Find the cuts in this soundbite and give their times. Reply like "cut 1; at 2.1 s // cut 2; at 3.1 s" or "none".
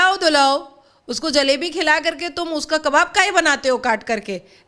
none